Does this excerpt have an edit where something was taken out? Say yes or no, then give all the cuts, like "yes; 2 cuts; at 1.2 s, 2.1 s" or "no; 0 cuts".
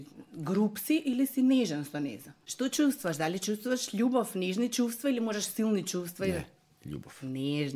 yes; 1 cut; at 2.4 s